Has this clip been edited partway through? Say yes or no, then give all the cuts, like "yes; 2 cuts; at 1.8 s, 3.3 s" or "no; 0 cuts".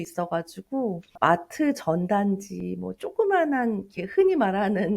yes; 1 cut; at 1.2 s